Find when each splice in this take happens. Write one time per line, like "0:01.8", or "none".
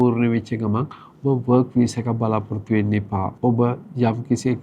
0:03.3

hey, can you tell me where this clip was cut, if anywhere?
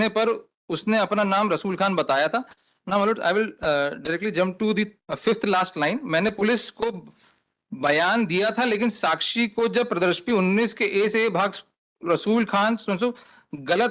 none

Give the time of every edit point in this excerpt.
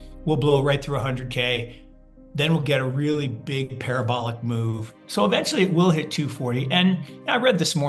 0:05.0

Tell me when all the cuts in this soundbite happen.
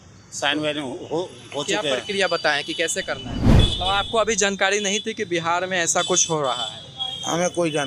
0:03.4

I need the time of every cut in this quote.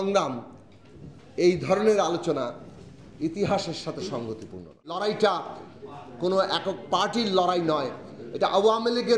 0:05.0

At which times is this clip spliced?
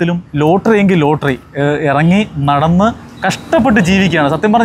none

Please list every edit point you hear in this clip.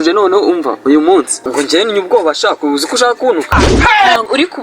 0:01.4

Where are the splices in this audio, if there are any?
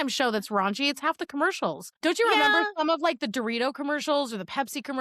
0:01.9

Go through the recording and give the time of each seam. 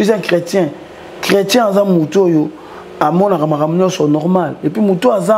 none

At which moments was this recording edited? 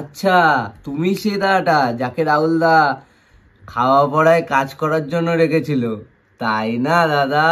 none

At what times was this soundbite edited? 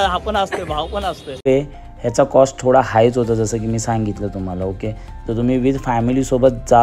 0:01.5

